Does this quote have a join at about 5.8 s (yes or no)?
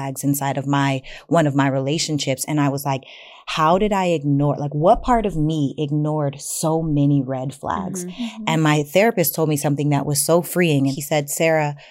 no